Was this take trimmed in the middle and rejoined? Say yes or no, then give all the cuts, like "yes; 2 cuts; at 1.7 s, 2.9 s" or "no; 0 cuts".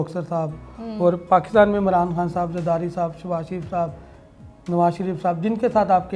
no; 0 cuts